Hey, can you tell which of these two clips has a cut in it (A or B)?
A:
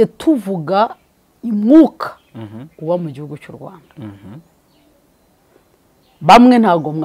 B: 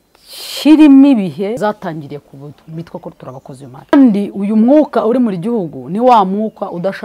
B